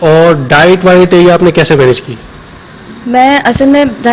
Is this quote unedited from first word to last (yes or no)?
yes